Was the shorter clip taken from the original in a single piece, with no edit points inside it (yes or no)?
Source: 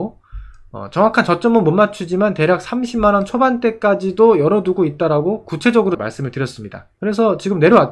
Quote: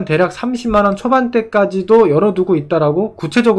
yes